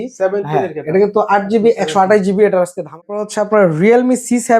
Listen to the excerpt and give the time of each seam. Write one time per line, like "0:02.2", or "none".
0:03.0